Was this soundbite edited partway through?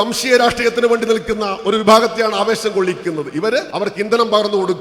yes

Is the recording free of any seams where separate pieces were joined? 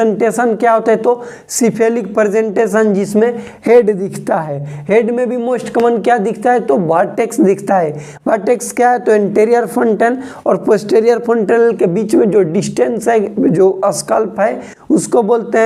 yes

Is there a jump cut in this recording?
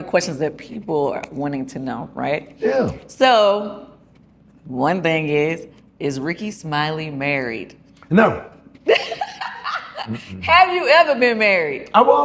no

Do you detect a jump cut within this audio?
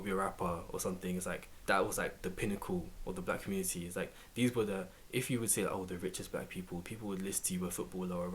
yes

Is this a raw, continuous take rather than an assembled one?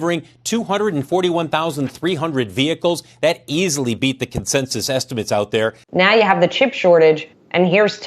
no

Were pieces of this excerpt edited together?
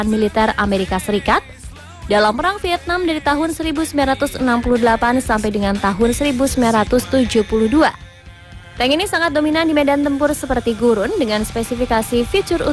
no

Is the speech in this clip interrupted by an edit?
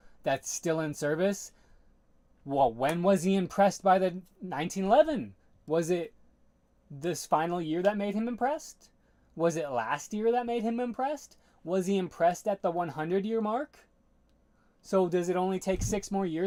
no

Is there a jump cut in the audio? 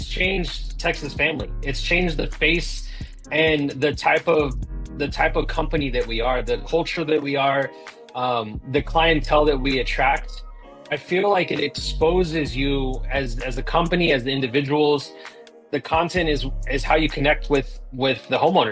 no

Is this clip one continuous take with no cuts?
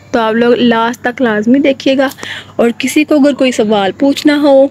yes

